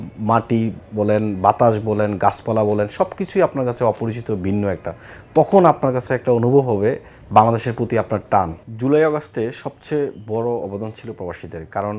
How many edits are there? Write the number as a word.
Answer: one